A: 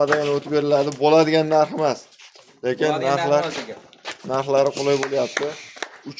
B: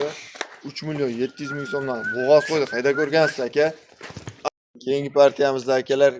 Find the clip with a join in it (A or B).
B